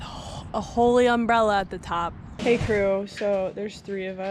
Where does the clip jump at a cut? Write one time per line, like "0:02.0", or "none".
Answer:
0:02.2